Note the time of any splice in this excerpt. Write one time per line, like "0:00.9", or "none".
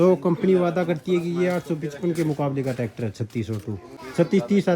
none